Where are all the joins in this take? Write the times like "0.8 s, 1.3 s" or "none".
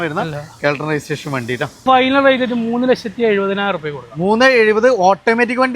1.8 s